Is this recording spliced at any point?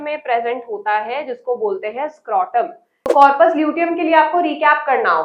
yes; 1 cut; at 2.9 s

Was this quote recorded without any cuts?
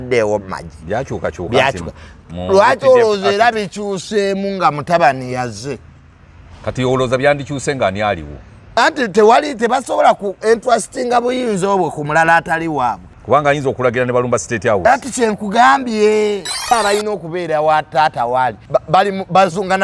no; 3 cuts; at 13.1 s, 16.7 s, 18.6 s

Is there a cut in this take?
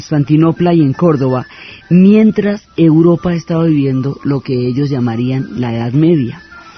no; 0 cuts

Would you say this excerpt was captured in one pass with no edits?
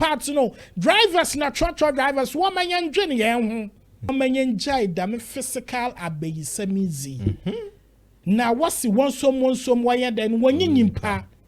no; 1 cut; at 4.1 s

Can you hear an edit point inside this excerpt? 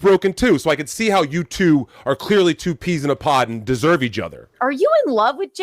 yes; 1 cut; at 4.6 s

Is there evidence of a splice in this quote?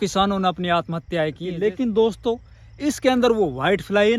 yes; 1 cut; at 1.5 s

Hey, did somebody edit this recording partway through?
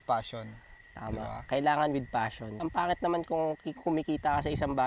no; 0 cuts

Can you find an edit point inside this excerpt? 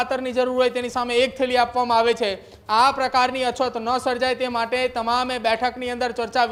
no; 0 cuts

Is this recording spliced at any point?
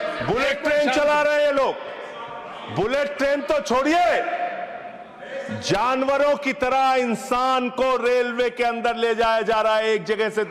no; 0 cuts

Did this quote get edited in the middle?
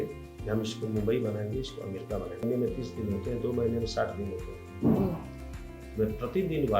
yes; 1 cut; at 2.4 s

